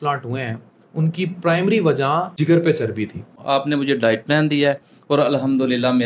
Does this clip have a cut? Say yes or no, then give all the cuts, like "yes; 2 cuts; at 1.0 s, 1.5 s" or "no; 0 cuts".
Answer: yes; 2 cuts; at 2.3 s, 3.4 s